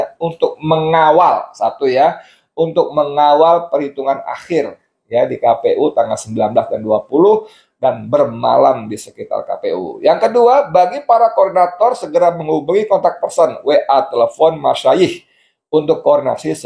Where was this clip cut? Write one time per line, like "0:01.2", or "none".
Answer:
none